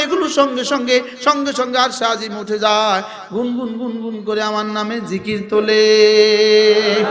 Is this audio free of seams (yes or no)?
yes